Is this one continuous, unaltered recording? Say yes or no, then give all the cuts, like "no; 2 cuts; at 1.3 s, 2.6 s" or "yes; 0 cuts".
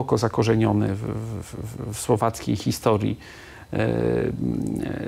yes; 0 cuts